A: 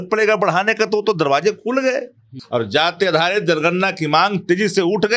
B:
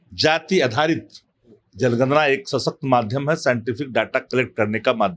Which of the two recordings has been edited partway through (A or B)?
A